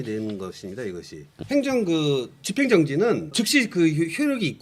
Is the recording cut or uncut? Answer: cut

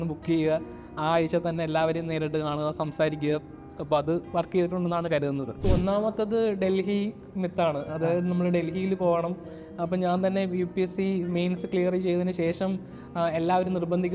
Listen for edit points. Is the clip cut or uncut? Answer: cut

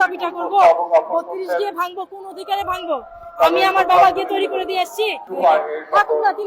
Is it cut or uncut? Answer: cut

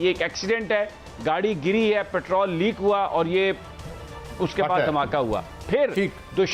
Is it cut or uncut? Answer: uncut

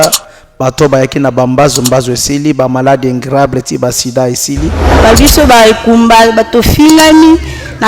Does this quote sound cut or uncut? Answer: cut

